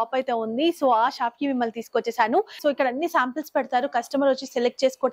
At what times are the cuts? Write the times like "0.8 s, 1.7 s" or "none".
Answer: 2.6 s